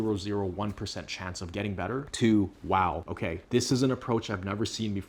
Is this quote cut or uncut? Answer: uncut